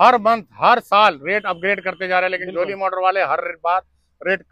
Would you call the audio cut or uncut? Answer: uncut